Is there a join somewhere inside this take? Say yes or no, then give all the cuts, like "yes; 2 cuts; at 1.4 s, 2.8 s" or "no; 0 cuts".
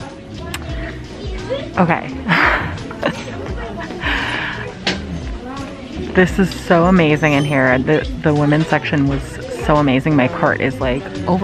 no; 0 cuts